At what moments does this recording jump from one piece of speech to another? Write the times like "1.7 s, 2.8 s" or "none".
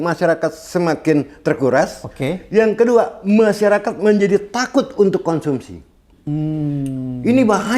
none